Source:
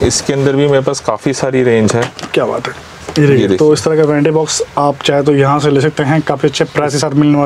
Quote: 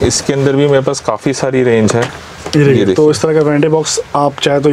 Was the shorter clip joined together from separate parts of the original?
yes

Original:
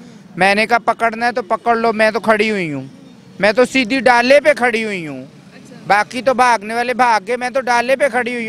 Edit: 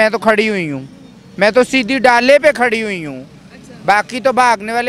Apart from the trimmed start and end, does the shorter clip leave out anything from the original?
no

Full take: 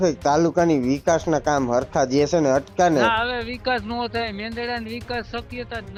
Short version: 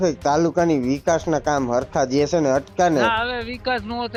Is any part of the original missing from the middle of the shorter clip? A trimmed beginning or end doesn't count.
no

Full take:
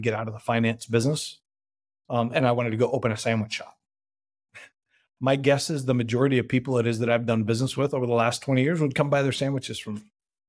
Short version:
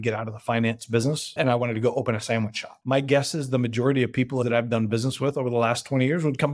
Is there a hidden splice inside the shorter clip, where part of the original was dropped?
yes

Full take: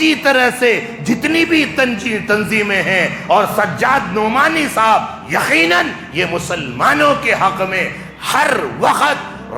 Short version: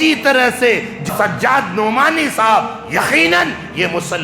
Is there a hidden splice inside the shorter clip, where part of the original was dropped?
yes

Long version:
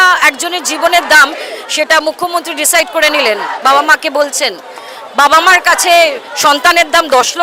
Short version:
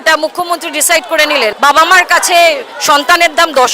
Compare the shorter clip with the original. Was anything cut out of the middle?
yes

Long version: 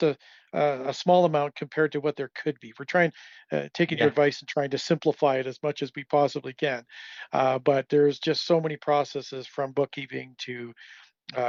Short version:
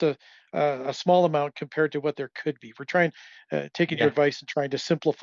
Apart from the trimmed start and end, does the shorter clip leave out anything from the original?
no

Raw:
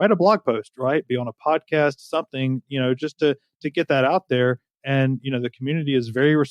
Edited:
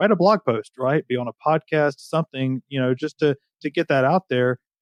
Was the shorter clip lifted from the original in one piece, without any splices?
yes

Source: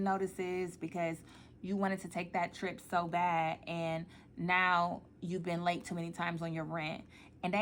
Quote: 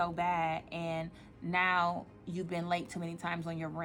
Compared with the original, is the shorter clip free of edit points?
yes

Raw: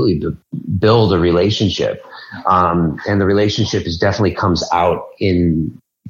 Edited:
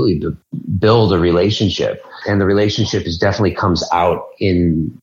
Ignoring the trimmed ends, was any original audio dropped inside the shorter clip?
yes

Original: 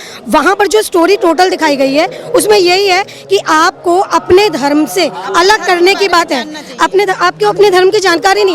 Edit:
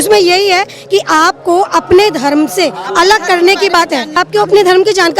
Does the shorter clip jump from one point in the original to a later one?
yes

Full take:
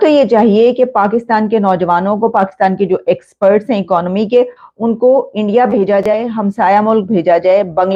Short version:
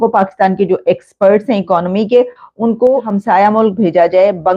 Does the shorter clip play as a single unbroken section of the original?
no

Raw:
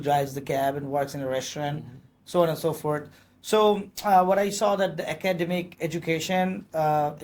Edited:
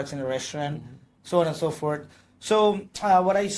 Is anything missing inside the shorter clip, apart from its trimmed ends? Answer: no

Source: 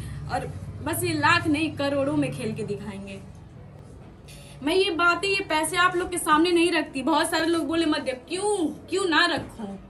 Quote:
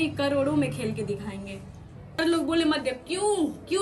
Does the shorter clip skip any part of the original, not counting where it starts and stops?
yes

